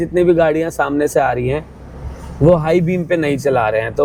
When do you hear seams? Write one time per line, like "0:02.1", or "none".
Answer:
none

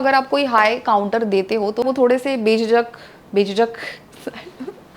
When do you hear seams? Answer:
0:01.8

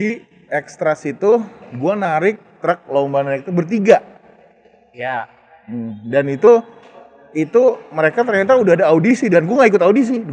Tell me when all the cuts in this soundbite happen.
none

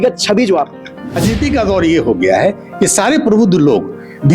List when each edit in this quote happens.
0:01.2

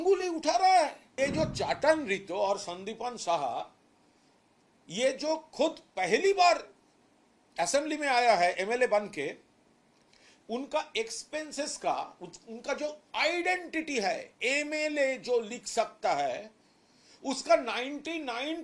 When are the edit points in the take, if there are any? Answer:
0:01.1

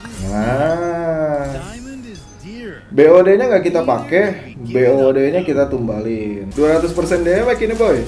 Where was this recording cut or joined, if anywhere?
0:06.4

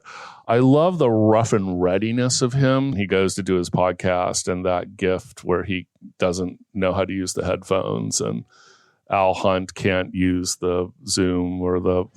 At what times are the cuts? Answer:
0:03.0

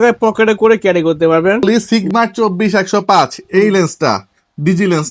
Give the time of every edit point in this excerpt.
0:01.6

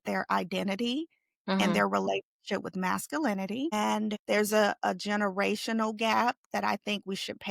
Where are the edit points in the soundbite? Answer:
0:04.2

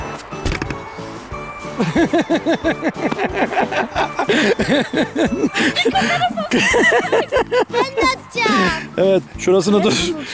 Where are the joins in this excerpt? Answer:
none

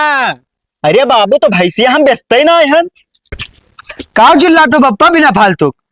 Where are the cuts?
0:03.4

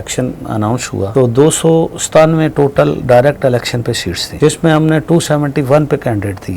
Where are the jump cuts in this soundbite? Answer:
0:01.1
0:04.3

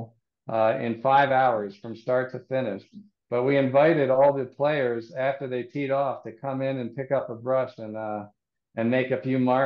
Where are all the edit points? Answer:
none

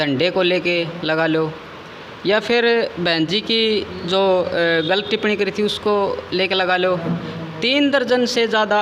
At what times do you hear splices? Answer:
none

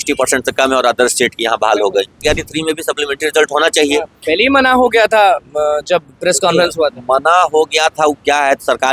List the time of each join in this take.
0:02.2

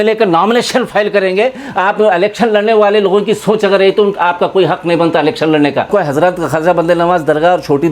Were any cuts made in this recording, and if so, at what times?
0:05.9

